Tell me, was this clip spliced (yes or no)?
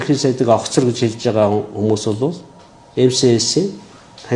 no